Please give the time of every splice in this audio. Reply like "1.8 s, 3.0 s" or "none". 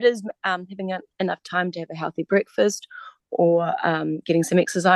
none